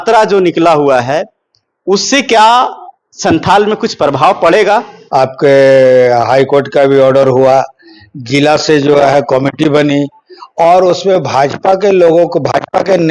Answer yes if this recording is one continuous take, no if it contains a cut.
no